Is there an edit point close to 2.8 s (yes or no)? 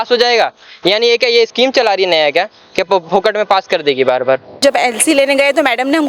no